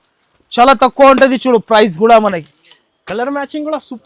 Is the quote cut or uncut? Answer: uncut